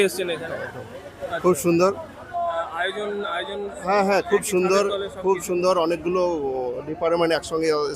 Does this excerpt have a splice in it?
no; 0 cuts

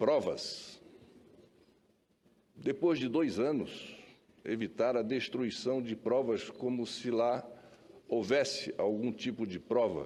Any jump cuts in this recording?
no; 0 cuts

